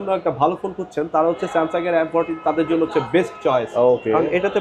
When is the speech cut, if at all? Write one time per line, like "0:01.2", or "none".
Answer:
none